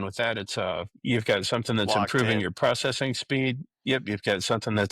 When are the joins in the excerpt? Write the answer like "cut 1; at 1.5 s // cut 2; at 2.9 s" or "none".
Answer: cut 1; at 1.0 s